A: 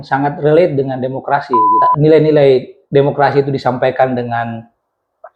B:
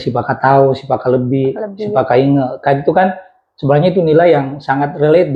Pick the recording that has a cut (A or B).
A